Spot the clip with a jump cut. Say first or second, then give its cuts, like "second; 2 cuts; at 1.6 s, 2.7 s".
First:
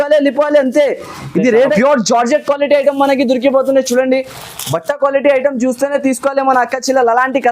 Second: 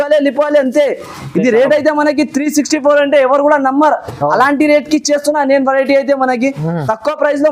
first; 1 cut; at 1.7 s